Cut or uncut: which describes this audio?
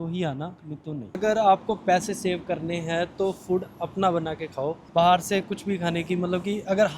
cut